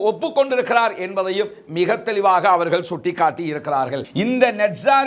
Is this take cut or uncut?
cut